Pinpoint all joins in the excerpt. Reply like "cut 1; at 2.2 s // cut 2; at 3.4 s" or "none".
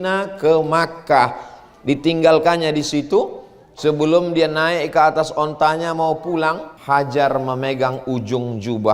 cut 1; at 6.7 s